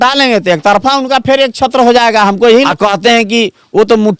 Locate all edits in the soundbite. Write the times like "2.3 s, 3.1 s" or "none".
2.7 s